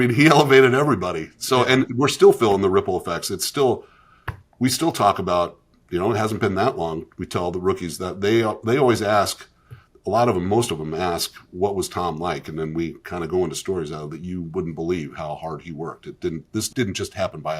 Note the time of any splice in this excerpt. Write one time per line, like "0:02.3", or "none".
0:16.7